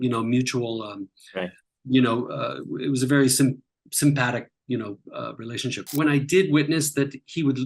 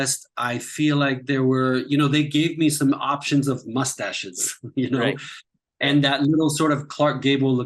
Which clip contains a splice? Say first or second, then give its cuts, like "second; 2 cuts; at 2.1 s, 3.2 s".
first; 1 cut; at 5.8 s